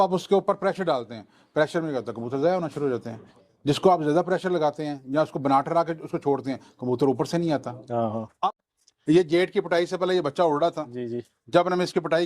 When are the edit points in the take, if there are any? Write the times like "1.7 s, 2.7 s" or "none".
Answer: 8.5 s